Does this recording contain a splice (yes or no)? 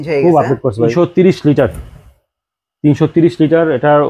yes